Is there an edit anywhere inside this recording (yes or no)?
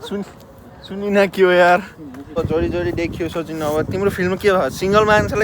yes